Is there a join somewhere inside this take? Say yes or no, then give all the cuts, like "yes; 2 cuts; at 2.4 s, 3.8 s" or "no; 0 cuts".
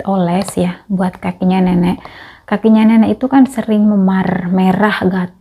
no; 0 cuts